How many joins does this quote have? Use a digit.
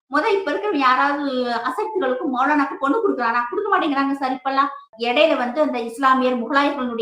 1